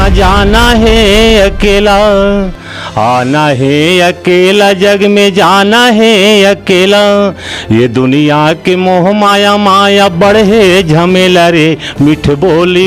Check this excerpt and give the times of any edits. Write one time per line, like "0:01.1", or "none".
none